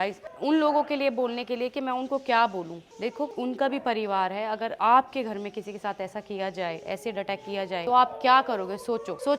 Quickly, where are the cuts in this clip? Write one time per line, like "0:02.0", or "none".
none